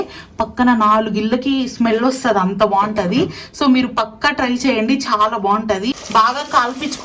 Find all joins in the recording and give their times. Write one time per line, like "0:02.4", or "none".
0:06.0